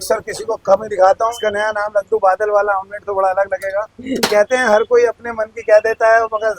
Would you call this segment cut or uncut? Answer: cut